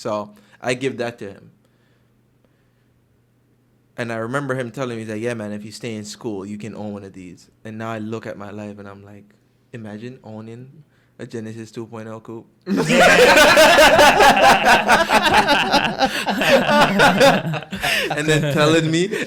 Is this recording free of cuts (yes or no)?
yes